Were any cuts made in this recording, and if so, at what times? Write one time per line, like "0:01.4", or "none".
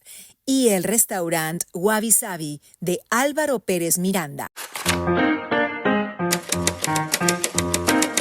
0:05.1

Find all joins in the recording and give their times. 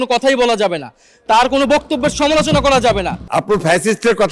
0:03.2

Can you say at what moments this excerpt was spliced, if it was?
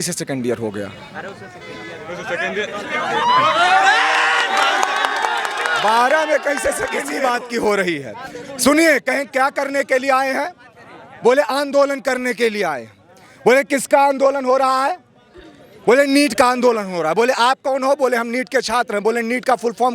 0:07.1

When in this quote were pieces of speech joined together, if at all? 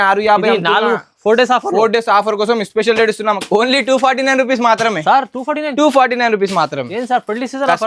0:03.4

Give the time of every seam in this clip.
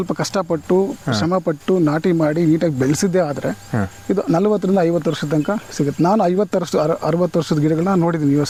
none

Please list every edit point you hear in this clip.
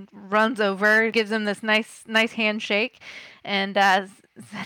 0:01.1

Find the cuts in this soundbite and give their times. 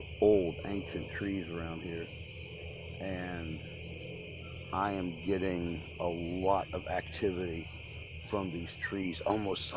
none

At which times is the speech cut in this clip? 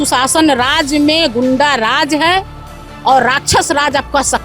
none

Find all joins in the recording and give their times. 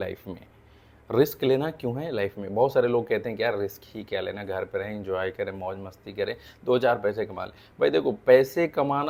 none

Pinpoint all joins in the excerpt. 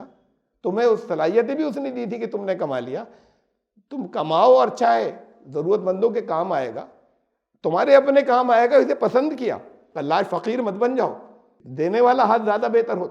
none

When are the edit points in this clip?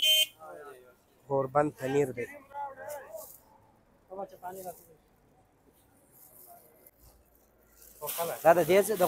none

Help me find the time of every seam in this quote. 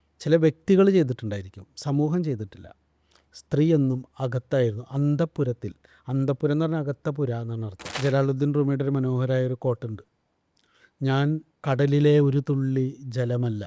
0:07.8
0:11.5

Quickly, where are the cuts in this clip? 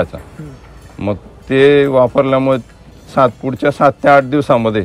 none

